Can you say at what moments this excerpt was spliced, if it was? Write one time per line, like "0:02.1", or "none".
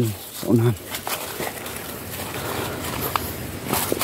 none